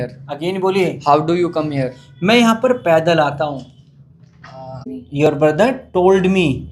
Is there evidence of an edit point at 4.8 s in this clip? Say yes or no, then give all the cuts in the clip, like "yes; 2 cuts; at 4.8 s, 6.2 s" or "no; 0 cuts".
yes; 1 cut; at 4.8 s